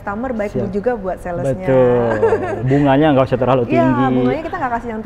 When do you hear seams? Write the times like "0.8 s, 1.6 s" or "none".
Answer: none